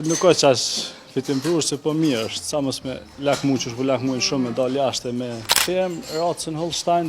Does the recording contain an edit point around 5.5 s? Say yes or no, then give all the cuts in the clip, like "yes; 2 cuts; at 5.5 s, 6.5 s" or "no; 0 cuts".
yes; 1 cut; at 5.5 s